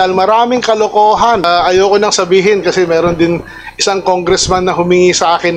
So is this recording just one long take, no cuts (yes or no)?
no